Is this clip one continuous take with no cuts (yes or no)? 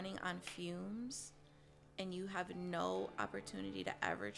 yes